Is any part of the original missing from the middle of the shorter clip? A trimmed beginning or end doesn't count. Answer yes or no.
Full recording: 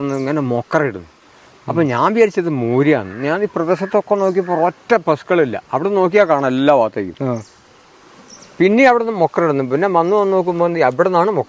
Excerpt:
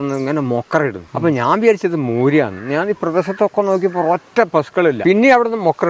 yes